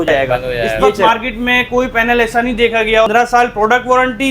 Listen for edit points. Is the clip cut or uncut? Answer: cut